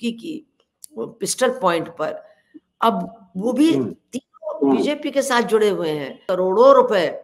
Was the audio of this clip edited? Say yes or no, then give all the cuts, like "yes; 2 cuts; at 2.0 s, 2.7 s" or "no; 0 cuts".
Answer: yes; 1 cut; at 6.2 s